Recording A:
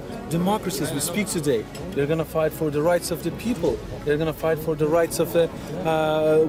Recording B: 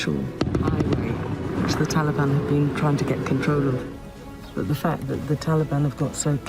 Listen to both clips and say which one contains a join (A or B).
B